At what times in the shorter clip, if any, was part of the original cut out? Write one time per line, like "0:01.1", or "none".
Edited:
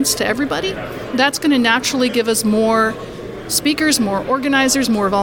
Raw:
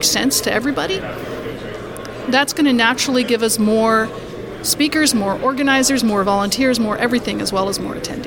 0:01.0